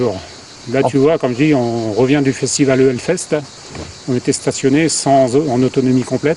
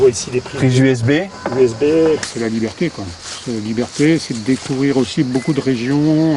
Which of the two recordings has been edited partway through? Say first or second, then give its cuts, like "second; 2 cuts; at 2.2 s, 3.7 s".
second; 1 cut; at 2.3 s